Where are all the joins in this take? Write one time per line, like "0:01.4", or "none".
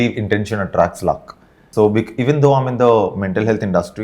0:01.6